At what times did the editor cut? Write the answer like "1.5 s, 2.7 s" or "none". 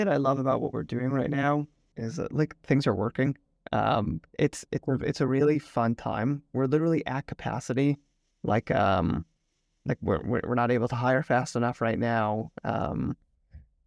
none